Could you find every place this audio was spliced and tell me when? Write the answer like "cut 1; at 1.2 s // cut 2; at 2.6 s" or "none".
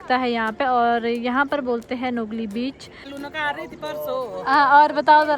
cut 1; at 3.1 s